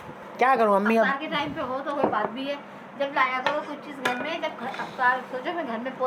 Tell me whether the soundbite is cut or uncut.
uncut